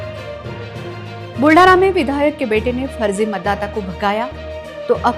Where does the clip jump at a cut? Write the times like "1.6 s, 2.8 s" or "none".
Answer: 0.9 s